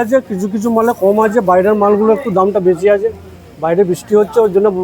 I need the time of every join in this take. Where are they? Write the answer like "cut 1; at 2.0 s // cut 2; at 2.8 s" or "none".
none